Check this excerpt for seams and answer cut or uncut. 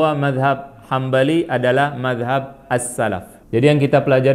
cut